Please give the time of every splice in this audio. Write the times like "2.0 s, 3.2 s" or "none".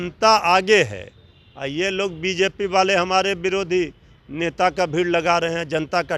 none